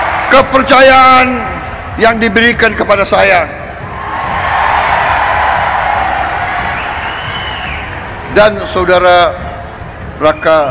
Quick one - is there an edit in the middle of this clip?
no; 0 cuts

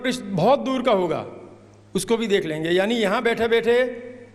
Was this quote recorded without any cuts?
yes; 0 cuts

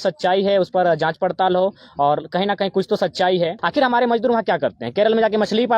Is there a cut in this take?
yes; 1 cut; at 3.6 s

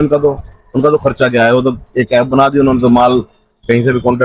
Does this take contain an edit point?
no; 0 cuts

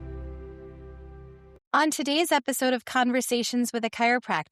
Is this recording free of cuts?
yes; 0 cuts

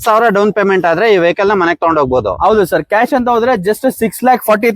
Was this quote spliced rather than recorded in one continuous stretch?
no; 0 cuts

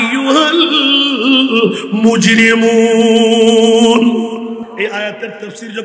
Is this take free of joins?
no; 1 cut; at 4.7 s

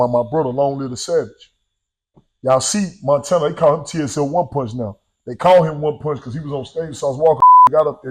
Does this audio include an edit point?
no; 0 cuts

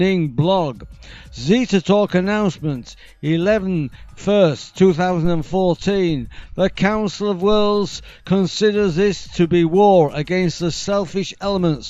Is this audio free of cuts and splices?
yes; 0 cuts

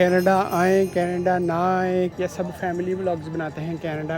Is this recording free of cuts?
no; 1 cut; at 2.1 s

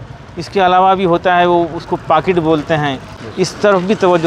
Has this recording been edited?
yes; 1 cut; at 3.2 s

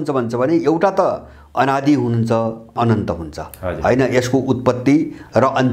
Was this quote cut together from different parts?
no; 0 cuts

